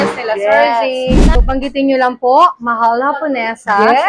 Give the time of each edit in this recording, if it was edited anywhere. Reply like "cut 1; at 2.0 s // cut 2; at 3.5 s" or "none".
cut 1; at 1.2 s